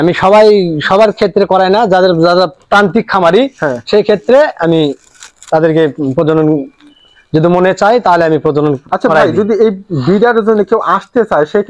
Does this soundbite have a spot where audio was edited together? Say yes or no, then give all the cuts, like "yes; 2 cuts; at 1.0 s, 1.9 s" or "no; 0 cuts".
no; 0 cuts